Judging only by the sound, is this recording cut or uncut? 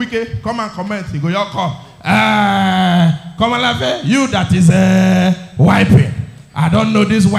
uncut